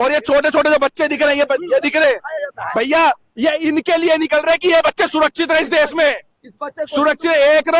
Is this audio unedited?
yes; 0 cuts

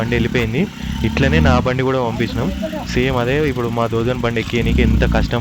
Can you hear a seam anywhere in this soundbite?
no; 0 cuts

